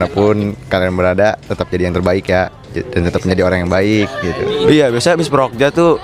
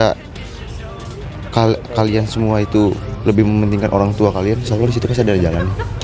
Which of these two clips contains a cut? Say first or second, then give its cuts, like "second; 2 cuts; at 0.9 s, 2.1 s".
first; 1 cut; at 4.7 s